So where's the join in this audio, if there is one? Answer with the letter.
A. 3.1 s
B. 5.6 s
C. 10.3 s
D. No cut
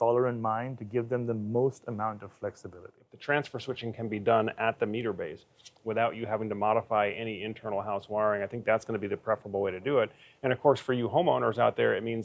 A